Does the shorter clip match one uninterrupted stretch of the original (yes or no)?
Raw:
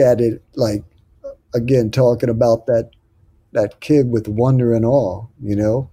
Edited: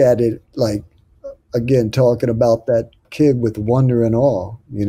no